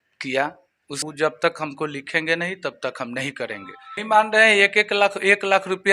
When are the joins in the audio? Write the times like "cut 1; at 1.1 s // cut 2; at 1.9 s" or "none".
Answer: cut 1; at 1.0 s // cut 2; at 4.0 s